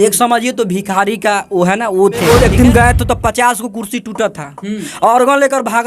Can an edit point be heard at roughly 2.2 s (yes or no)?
yes